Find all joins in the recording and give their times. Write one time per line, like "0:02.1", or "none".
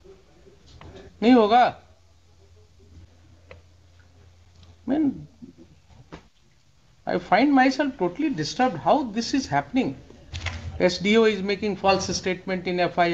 0:03.0